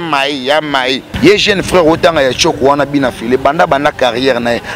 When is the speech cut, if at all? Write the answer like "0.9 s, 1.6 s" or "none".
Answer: 1.1 s